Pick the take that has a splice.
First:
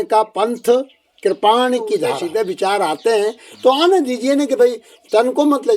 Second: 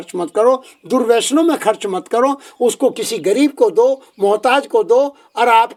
first; 1 cut; at 2.2 s

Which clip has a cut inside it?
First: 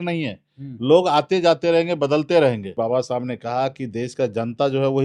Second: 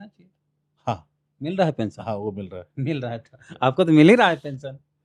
first; 1 cut; at 2.8 s

